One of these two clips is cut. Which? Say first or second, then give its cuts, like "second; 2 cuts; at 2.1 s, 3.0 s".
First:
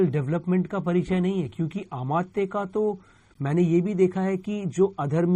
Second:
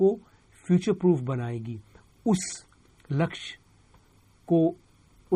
first; 1 cut; at 3.3 s